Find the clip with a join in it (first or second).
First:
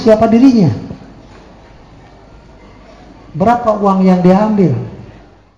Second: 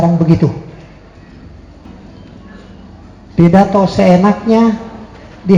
second